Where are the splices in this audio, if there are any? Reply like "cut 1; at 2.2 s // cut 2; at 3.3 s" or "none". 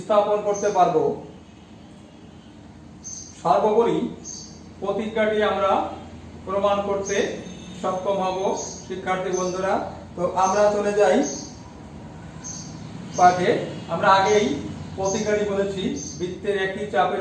none